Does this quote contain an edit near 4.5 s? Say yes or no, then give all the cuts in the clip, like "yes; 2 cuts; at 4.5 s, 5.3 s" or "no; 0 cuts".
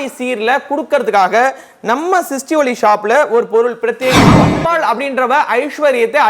yes; 1 cut; at 4.5 s